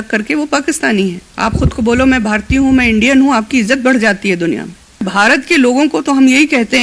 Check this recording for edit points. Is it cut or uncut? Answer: cut